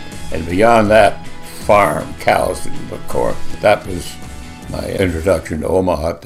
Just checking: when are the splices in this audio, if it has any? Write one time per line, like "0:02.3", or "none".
0:04.9